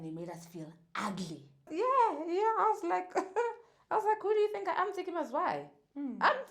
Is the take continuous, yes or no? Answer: no